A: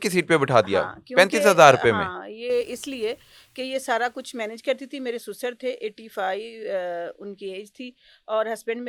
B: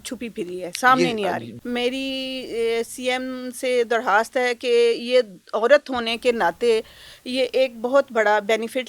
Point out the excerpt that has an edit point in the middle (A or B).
B